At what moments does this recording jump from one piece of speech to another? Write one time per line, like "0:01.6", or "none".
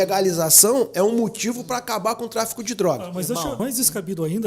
0:03.6

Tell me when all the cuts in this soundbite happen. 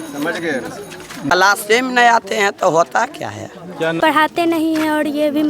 0:01.4
0:04.3

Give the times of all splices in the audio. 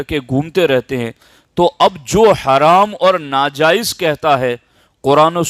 none

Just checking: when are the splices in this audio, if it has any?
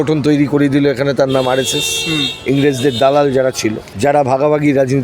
0:03.8

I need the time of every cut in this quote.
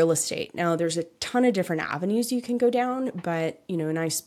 none

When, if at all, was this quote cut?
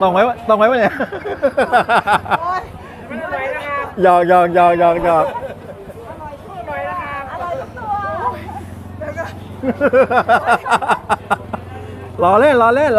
none

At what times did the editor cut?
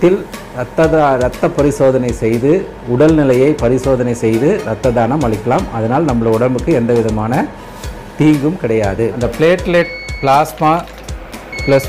0:09.2

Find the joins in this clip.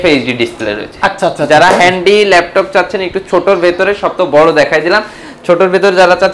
none

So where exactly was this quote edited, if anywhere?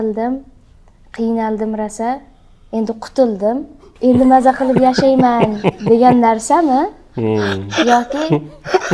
none

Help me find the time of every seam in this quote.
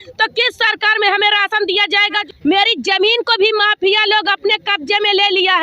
0:02.2

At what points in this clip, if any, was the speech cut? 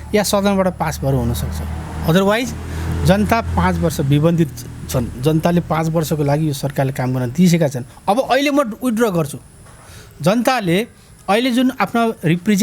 none

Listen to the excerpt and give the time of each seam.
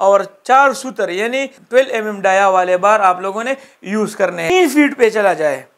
0:04.4

